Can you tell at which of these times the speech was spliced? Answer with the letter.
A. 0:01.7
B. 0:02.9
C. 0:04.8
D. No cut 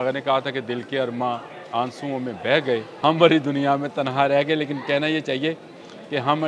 B